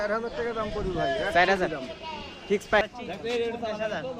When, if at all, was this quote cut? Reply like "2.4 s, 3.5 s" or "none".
2.8 s